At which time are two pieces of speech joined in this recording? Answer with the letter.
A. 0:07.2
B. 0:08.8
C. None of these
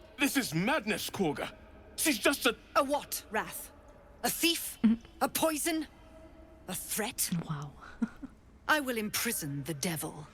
C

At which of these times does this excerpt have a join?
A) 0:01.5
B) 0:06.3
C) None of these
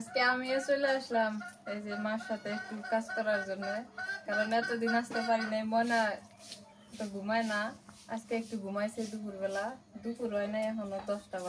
C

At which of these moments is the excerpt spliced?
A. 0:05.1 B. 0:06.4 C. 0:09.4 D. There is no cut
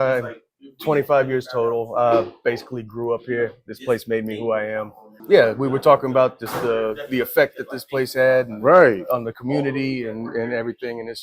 A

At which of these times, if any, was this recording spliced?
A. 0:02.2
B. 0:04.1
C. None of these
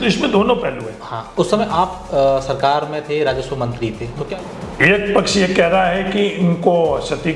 B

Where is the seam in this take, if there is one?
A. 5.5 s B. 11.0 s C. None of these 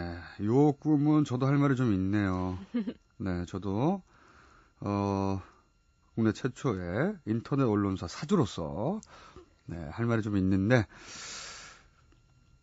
B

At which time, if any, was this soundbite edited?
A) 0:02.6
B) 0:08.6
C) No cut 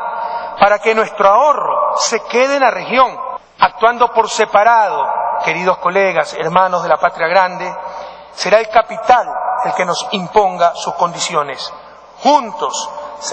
A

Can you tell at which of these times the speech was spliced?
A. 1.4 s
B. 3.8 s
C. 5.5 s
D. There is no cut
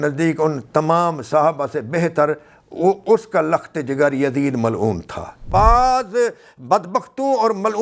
C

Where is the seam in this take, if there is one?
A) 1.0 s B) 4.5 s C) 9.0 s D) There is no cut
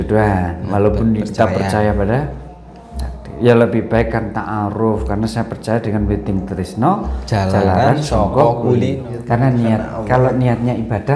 C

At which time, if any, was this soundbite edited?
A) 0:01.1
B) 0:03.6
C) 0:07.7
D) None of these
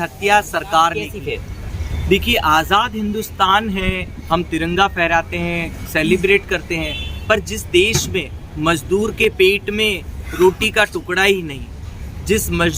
A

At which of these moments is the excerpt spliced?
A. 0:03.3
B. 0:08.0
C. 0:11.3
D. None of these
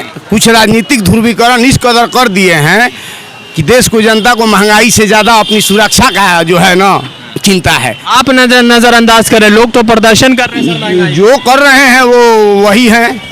B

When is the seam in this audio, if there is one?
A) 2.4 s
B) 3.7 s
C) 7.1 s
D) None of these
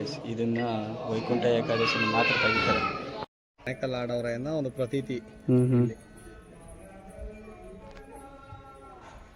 B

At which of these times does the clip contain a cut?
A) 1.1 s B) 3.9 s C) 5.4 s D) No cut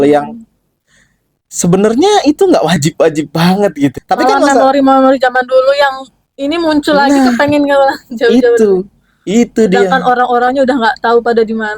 B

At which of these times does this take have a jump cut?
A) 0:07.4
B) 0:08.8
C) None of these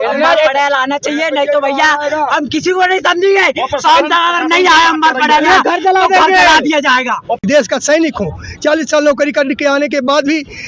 A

